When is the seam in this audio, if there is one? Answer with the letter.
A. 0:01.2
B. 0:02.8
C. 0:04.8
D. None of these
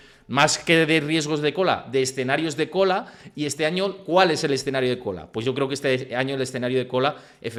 D